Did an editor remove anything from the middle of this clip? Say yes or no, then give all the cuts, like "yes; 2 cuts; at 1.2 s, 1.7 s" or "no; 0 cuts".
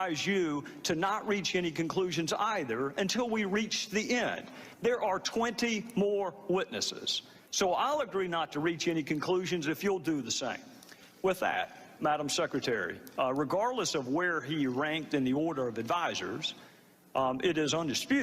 no; 0 cuts